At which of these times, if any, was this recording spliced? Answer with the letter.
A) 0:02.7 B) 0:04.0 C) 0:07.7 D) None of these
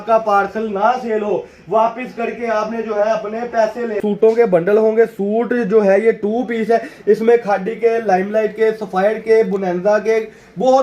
B